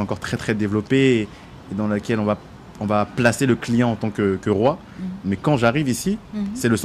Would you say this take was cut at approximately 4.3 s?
no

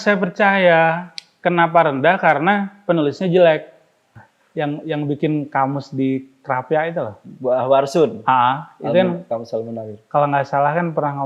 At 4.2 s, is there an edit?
yes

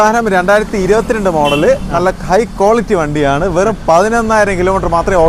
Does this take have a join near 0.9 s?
no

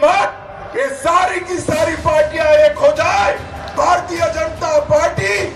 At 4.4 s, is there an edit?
no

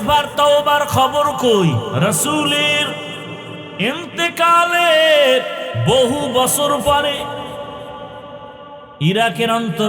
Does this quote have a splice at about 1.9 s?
yes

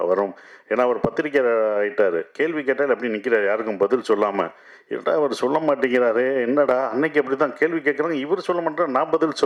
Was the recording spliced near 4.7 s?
no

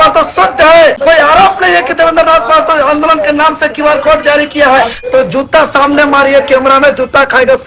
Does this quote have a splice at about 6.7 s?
no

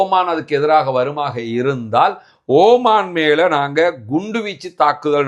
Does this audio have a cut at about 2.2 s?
no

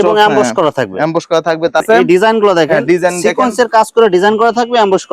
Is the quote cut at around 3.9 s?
no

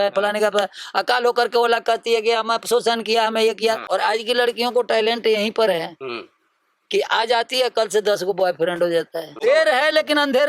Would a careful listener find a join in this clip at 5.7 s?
no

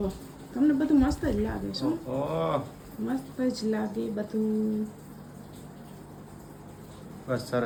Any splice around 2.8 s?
no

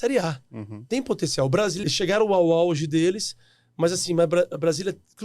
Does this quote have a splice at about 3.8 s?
no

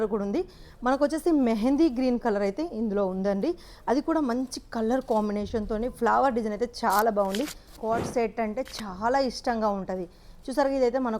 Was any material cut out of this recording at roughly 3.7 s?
no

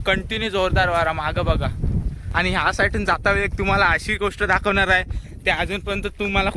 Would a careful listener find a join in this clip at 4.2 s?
no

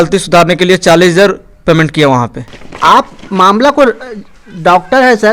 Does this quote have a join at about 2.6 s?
yes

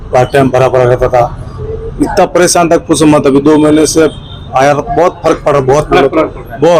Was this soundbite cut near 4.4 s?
no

